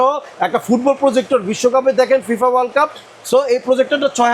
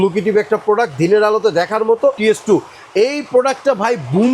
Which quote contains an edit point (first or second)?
second